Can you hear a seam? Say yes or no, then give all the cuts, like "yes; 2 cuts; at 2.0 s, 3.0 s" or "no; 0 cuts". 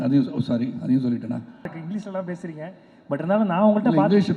yes; 1 cut; at 1.8 s